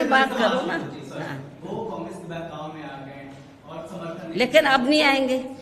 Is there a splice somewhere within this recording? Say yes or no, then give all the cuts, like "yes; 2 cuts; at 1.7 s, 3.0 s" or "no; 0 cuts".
no; 0 cuts